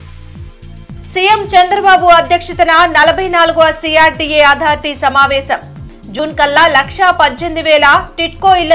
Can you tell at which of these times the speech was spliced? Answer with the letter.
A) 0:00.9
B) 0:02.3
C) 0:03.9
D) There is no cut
A